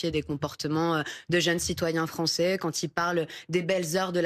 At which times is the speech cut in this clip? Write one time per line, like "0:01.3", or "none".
none